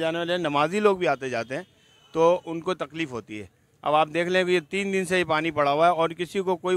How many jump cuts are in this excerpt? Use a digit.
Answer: 0